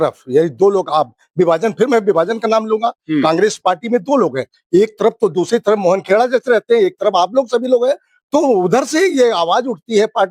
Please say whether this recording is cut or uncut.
uncut